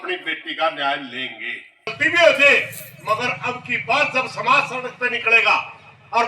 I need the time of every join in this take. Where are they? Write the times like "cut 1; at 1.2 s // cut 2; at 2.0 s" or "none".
cut 1; at 2.0 s